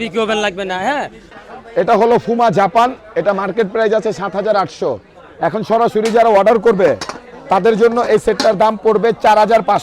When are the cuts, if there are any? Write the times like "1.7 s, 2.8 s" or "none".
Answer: 1.3 s

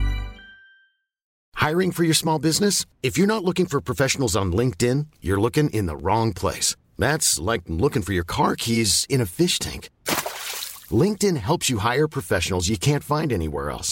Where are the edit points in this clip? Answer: 1.4 s

